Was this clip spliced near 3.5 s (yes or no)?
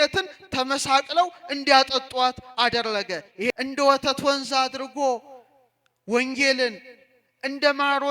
yes